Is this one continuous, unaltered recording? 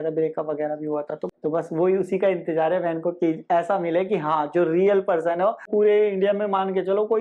no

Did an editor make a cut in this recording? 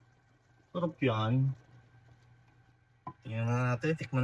yes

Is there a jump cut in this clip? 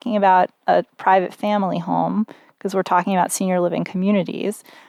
no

